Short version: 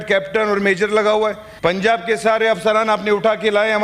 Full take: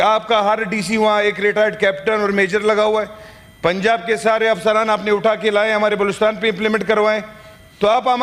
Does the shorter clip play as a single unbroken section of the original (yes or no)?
no